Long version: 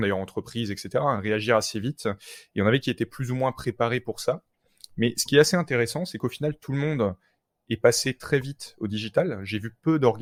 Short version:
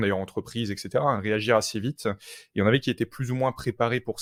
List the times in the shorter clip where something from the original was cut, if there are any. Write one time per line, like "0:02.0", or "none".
none

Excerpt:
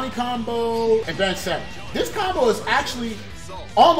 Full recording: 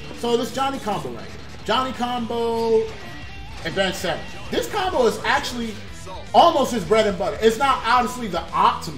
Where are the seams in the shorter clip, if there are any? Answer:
0:01.1

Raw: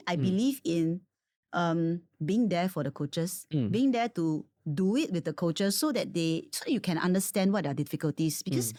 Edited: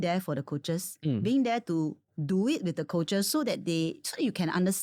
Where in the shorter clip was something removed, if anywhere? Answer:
none

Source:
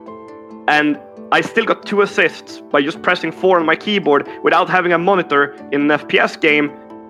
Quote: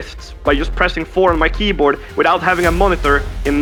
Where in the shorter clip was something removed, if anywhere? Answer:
none

